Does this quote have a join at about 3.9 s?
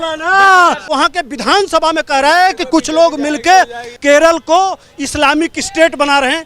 yes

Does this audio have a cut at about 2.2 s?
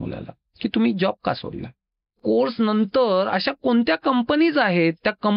yes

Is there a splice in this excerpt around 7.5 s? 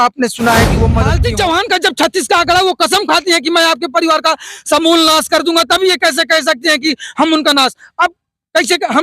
no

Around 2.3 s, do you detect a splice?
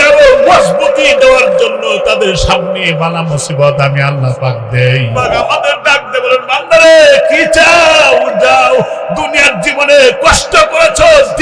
no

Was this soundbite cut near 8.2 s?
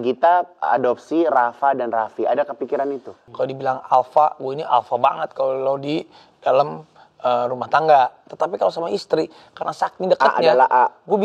yes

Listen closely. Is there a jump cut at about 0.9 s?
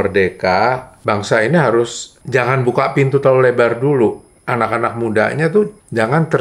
yes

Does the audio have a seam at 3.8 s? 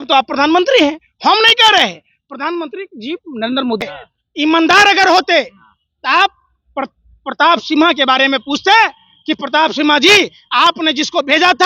no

